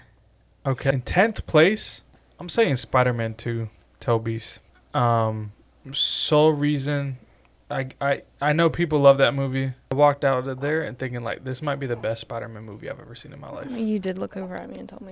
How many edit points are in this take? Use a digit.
2